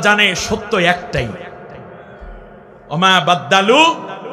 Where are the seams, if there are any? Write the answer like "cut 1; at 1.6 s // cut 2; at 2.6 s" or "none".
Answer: none